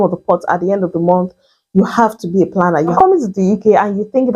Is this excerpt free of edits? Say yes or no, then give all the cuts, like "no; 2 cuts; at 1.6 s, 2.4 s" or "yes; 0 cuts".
no; 1 cut; at 2.9 s